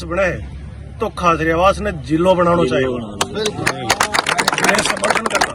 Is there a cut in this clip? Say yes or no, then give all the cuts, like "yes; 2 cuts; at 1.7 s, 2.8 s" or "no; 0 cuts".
no; 0 cuts